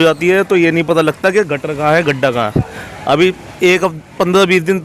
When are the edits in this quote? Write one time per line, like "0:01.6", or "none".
none

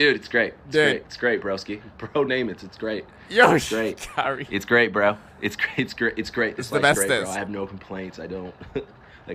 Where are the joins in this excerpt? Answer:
none

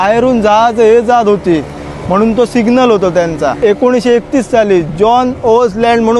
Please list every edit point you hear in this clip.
0:03.6

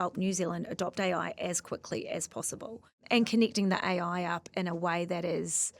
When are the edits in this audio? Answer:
0:02.9

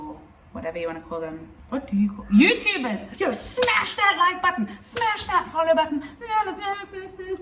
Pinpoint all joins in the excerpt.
0:01.5
0:03.1

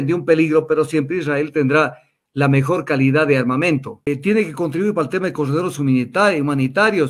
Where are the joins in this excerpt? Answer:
0:04.1

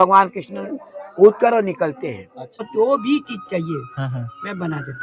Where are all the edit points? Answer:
0:02.6

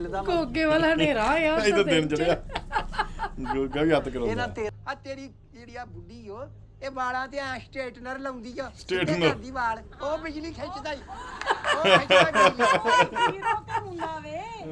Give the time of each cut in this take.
0:04.7

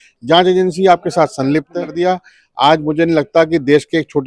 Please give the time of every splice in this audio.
0:01.9

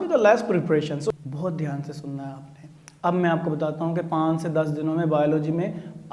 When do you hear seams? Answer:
0:01.0

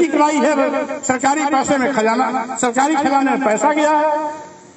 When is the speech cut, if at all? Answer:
none

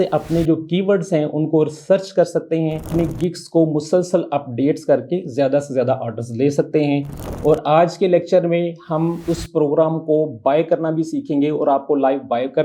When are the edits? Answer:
0:02.9

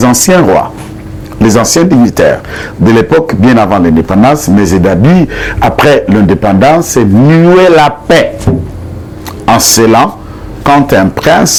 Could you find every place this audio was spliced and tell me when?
none

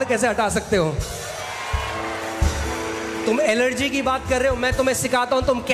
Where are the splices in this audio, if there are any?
none

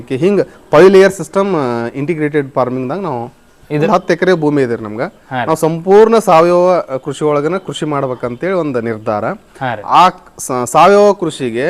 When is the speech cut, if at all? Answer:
0:03.9

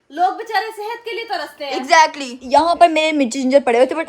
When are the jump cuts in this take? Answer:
0:02.3

